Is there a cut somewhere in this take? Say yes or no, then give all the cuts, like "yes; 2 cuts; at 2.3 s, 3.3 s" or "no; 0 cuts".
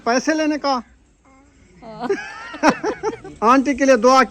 yes; 1 cut; at 3.2 s